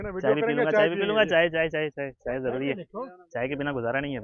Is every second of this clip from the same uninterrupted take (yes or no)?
yes